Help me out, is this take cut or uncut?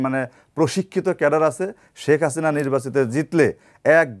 uncut